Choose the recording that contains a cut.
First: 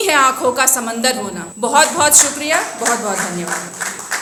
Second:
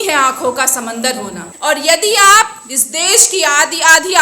second; 1 cut; at 1.5 s

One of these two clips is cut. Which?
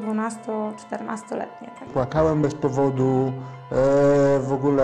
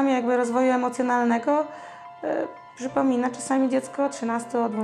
first; 1 cut; at 1.9 s

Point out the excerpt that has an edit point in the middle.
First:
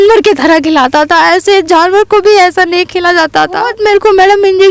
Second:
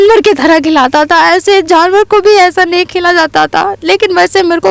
first; 1 cut; at 3.7 s

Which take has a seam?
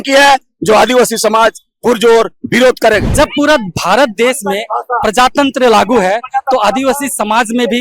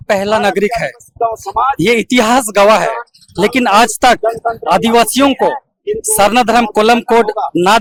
first; 1 cut; at 3.1 s

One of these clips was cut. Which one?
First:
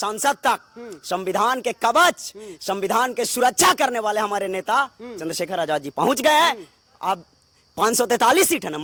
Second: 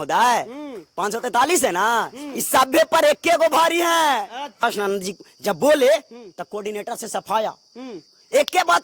second; 1 cut; at 4.6 s

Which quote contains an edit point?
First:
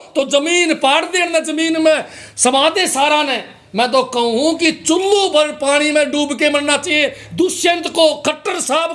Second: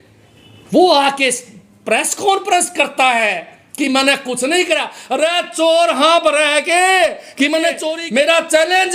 second; 1 cut; at 7.9 s

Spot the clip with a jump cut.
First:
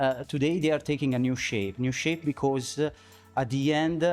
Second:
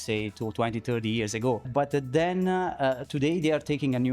second; 1 cut; at 1.7 s

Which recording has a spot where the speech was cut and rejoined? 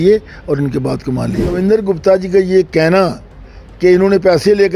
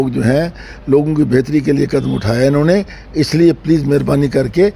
first; 1 cut; at 1.6 s

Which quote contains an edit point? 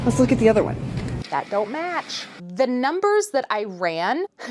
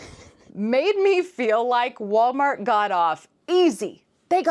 first; 1 cut; at 2.2 s

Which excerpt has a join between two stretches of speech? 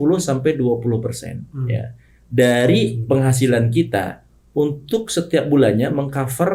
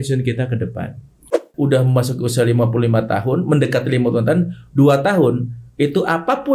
second; 1 cut; at 1.5 s

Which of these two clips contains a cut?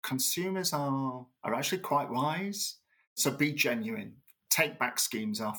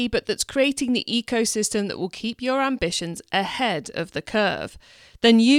first; 2 cuts; at 1.3 s, 3.2 s

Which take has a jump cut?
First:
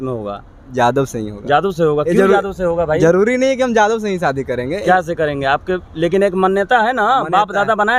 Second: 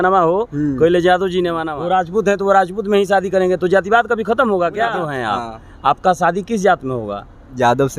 second; 2 cuts; at 1.6 s, 5.1 s

